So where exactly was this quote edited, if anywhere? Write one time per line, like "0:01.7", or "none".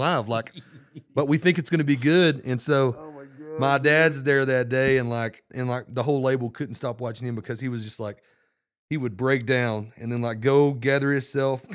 0:05.5